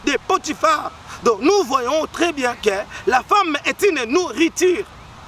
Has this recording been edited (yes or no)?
no